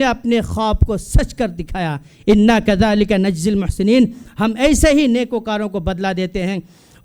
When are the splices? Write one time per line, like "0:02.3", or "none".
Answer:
none